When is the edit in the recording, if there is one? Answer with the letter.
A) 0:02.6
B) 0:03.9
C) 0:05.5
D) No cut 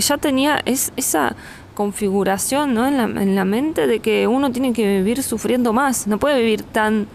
D